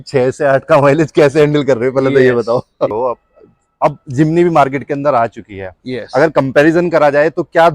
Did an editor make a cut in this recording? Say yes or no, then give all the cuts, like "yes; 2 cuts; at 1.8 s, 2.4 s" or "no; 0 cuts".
yes; 1 cut; at 2.9 s